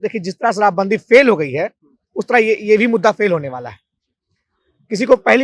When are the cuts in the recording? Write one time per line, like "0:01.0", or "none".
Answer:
none